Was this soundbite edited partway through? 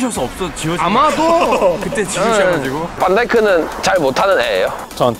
no; 0 cuts

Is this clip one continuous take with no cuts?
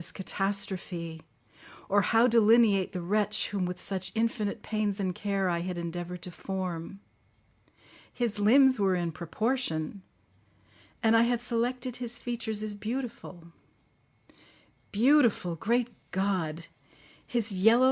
yes; 0 cuts

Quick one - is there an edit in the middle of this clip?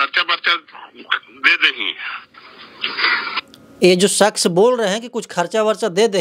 no; 0 cuts

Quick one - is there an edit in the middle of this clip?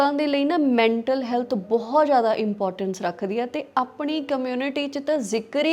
no; 0 cuts

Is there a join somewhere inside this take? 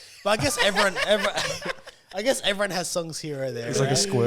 no; 0 cuts

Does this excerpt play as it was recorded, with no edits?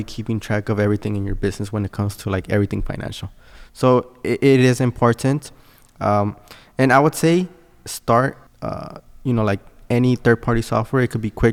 yes; 0 cuts

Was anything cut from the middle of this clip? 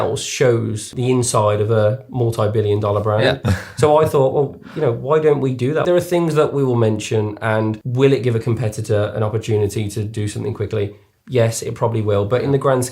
yes; 3 cuts; at 0.9 s, 5.8 s, 7.8 s

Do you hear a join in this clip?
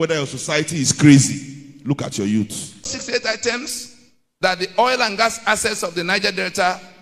yes; 1 cut; at 3.0 s

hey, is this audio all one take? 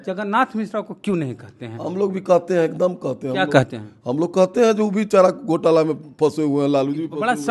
yes; 0 cuts

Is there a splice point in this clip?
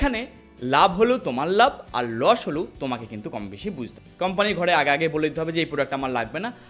no; 0 cuts

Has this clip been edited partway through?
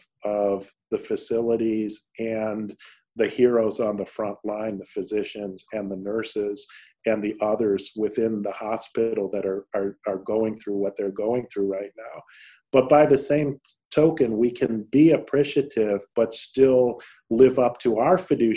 no; 0 cuts

